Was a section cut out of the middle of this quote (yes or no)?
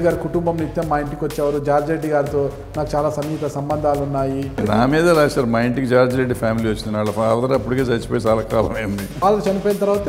yes